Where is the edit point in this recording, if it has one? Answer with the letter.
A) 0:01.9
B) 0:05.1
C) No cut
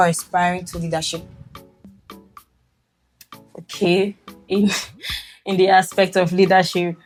C